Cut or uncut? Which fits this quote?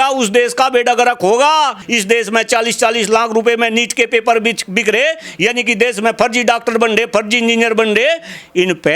cut